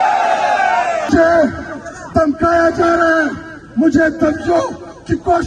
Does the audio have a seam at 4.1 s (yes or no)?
no